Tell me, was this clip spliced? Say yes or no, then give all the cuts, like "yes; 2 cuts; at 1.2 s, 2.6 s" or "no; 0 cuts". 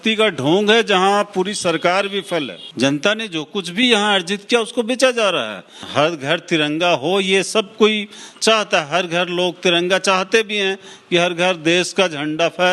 yes; 2 cuts; at 2.6 s, 5.9 s